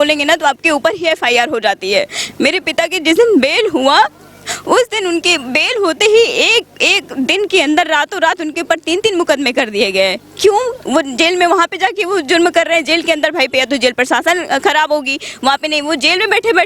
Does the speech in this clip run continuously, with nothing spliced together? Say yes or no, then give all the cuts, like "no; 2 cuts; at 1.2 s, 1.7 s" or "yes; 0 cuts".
yes; 0 cuts